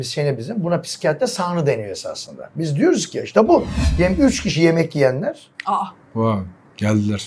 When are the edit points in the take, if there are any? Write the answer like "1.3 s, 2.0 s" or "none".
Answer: 3.8 s